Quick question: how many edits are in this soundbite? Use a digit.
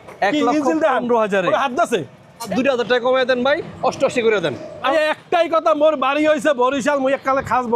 2